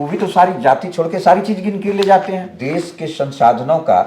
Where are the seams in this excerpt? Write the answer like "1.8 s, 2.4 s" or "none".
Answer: 2.6 s